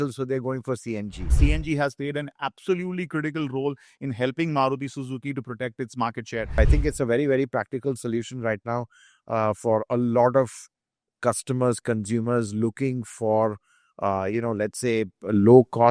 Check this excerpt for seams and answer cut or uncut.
cut